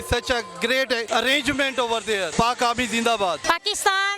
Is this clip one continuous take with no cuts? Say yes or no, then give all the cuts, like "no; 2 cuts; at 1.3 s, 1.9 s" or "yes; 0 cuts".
no; 3 cuts; at 1.0 s, 2.3 s, 3.4 s